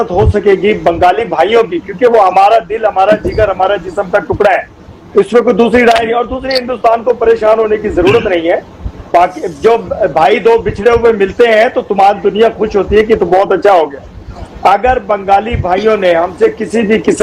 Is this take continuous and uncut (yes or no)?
yes